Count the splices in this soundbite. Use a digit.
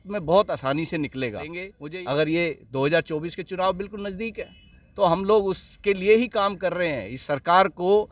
1